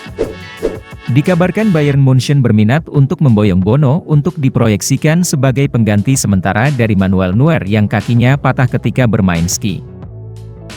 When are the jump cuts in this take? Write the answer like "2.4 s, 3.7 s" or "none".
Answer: 0.9 s